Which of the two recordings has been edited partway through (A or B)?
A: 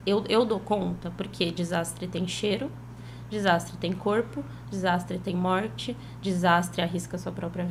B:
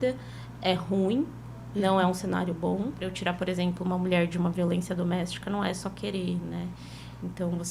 B